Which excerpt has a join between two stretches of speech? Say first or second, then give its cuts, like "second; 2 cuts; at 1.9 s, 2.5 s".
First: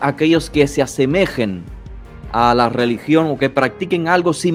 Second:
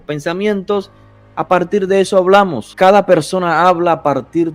second; 1 cut; at 2.6 s